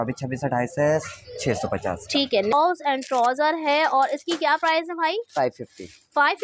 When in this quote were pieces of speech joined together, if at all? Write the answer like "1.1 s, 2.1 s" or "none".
2.5 s